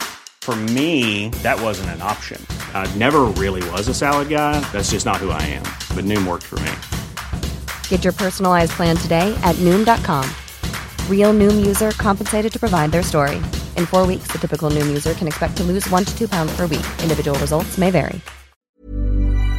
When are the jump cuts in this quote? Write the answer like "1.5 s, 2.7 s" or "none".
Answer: 18.7 s